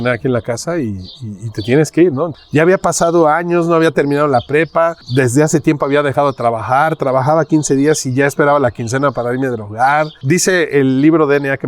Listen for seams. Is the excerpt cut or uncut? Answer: cut